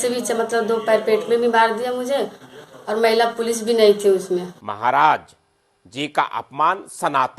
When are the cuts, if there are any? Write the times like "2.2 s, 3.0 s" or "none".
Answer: 4.6 s